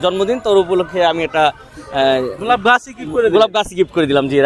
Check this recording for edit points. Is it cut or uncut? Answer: uncut